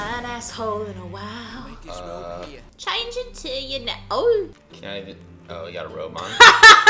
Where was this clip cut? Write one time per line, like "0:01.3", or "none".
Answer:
0:02.7
0:04.7